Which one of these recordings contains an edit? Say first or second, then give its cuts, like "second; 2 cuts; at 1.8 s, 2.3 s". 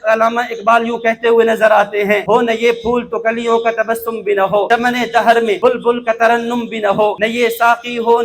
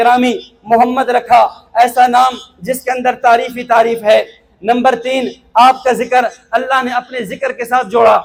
first; 4 cuts; at 2.2 s, 4.7 s, 5.6 s, 7.2 s